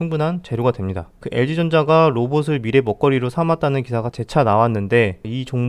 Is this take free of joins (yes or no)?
yes